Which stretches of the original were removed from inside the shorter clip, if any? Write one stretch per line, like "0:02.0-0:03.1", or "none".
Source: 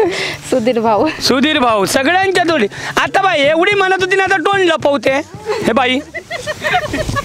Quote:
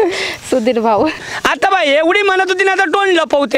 0:01.2-0:02.7